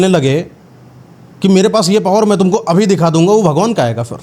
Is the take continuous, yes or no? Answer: yes